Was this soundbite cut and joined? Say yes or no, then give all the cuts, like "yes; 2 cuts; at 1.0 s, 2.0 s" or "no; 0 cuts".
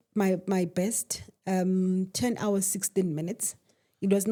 no; 0 cuts